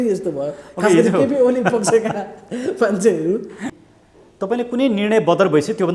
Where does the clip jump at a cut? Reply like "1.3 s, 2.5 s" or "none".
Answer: 3.7 s